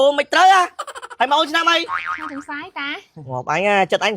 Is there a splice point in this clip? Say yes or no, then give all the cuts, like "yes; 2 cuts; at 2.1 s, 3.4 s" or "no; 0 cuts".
no; 0 cuts